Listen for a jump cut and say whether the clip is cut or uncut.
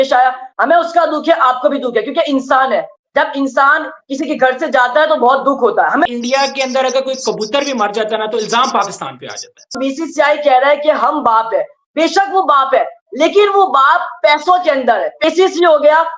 cut